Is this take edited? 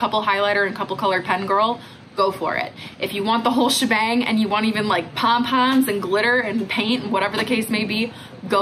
no; 0 cuts

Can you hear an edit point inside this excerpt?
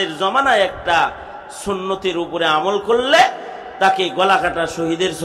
no; 0 cuts

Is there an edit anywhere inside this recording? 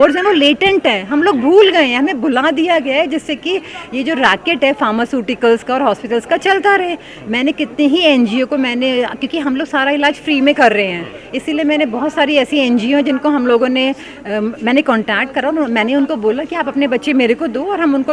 no; 0 cuts

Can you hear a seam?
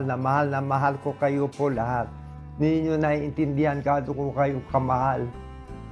no; 0 cuts

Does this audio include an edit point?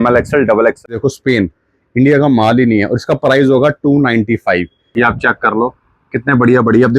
yes; 2 cuts; at 0.9 s, 4.8 s

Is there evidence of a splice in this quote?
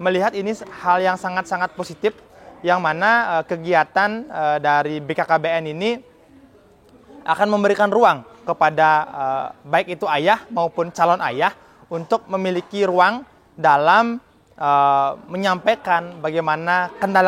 no; 0 cuts

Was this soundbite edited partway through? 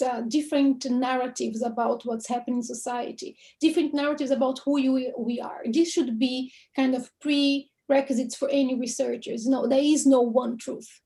no; 0 cuts

